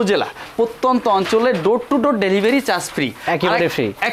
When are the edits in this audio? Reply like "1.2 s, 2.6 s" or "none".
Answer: none